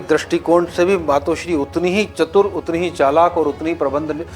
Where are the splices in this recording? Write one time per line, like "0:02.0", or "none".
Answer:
none